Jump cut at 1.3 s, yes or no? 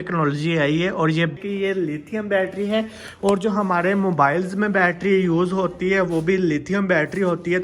yes